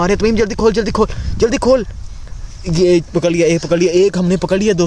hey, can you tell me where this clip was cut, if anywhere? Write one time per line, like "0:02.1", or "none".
none